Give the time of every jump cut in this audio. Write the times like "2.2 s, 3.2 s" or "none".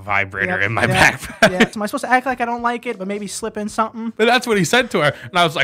1.7 s, 4.1 s